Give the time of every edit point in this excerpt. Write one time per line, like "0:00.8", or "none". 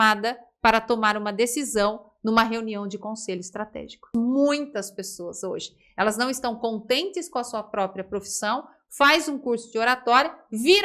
0:04.1

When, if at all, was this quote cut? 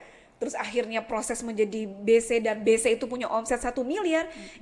none

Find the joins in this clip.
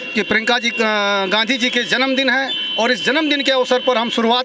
none

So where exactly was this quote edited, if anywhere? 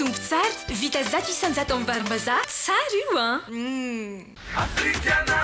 0:04.3

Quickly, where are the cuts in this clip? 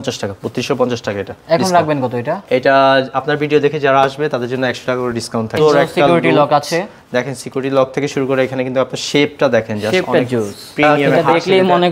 0:05.6
0:11.0

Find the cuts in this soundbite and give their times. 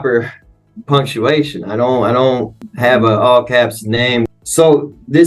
0:02.6
0:04.3

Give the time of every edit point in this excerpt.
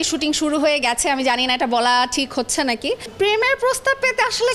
0:03.1

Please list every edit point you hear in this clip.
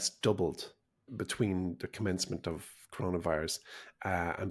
0:01.0

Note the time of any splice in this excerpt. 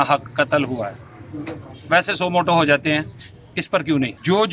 none

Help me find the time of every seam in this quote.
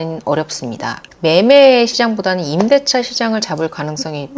0:01.0

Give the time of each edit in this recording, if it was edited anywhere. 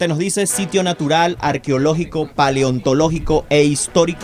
none

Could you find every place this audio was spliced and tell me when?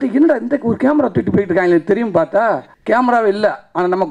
0:02.7

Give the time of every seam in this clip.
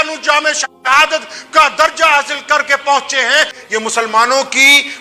0:03.6

